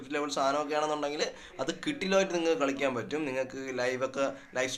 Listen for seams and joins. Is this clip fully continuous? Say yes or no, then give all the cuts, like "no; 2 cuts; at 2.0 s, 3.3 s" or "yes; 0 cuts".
yes; 0 cuts